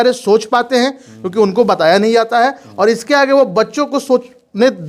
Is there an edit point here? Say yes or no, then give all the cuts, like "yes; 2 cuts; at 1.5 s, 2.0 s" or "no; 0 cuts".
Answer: no; 0 cuts